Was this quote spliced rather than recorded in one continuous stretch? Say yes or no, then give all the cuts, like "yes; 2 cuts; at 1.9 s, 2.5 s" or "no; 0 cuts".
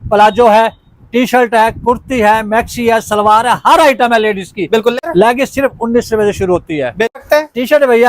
yes; 2 cuts; at 5.0 s, 7.2 s